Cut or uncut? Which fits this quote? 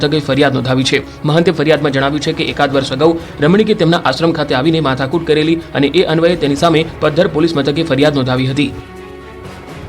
cut